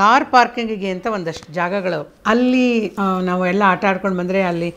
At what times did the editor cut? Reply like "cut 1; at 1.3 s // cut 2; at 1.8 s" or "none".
cut 1; at 2.1 s // cut 2; at 2.9 s